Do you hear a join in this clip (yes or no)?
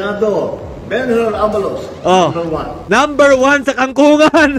no